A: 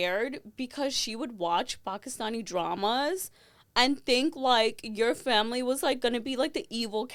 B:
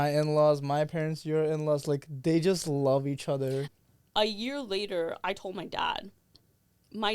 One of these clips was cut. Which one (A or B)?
B